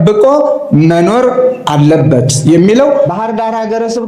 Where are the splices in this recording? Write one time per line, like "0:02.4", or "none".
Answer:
0:03.1

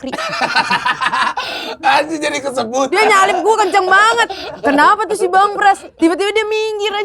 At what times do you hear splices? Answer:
0:02.9
0:05.9

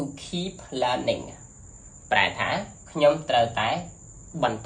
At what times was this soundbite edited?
none

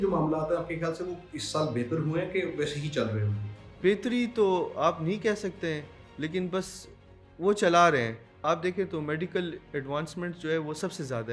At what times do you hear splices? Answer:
0:03.7
0:08.4
0:09.6

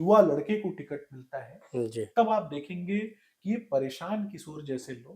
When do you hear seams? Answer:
none

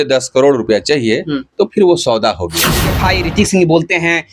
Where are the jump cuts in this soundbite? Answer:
0:02.9

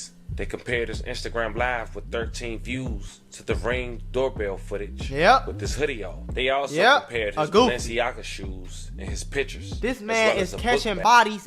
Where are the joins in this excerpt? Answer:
none

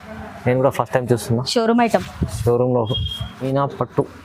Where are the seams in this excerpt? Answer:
0:03.3

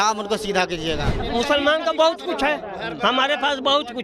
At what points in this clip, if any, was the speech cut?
0:01.1

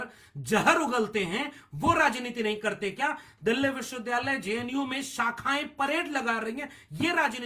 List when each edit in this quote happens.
none

